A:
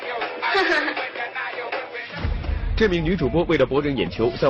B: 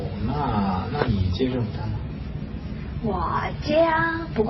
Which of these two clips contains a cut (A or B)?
A